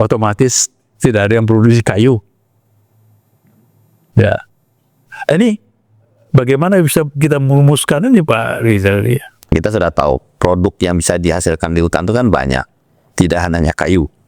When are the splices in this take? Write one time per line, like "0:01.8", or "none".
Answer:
0:09.5